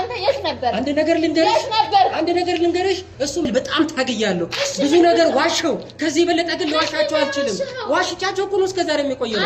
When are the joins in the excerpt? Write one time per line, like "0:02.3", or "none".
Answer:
0:03.5